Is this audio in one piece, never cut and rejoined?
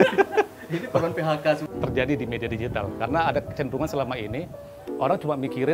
no; 1 cut; at 1.6 s

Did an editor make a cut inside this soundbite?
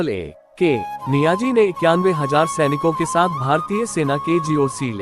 yes; 1 cut; at 1.0 s

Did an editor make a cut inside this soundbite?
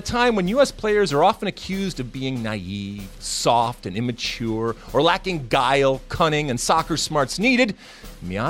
no; 0 cuts

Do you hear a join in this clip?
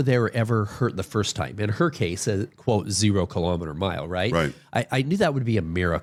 no; 0 cuts

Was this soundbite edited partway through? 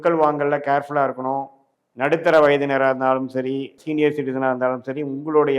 yes; 2 cuts; at 1.6 s, 3.8 s

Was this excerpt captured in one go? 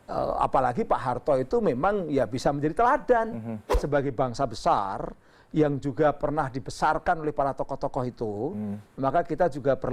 no; 1 cut; at 3.8 s

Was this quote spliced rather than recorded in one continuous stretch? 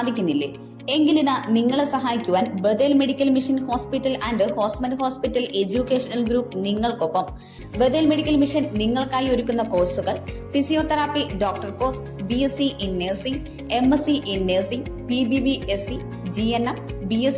no; 0 cuts

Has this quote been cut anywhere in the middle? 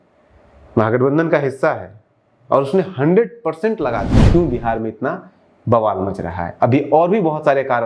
yes; 1 cut; at 4.2 s

